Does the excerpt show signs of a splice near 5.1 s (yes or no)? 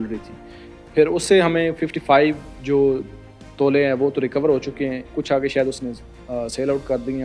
yes